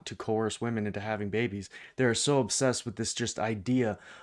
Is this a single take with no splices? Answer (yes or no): yes